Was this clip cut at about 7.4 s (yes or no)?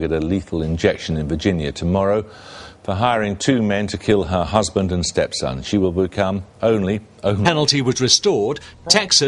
no